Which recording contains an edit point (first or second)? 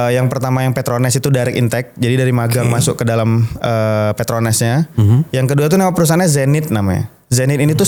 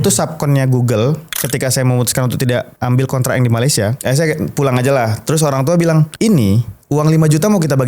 second